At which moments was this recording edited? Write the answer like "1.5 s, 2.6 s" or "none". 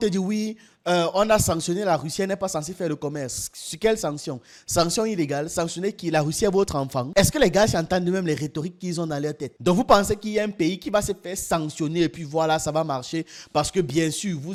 none